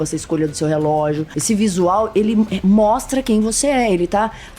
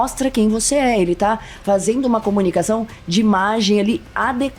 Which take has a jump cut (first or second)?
first